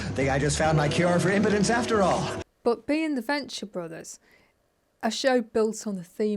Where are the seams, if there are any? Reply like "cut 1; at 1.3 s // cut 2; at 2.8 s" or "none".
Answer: none

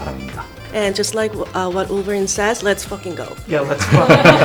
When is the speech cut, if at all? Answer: none

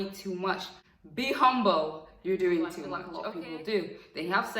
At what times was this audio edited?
cut 1; at 3.1 s

